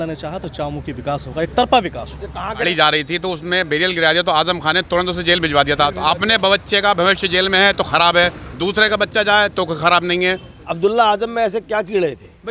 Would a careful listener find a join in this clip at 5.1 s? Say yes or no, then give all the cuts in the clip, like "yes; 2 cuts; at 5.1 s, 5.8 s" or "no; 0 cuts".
no; 2 cuts; at 2.6 s, 10.6 s